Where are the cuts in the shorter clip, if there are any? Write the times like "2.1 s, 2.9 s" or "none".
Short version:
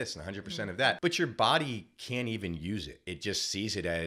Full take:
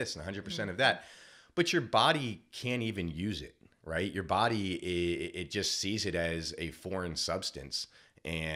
1.0 s, 3.1 s